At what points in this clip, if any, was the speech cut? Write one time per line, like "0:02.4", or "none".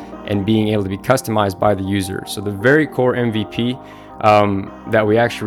none